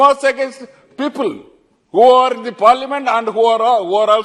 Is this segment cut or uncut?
uncut